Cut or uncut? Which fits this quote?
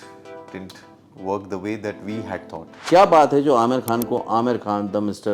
cut